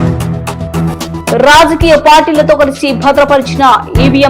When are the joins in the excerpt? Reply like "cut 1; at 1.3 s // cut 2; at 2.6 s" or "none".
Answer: cut 1; at 1.3 s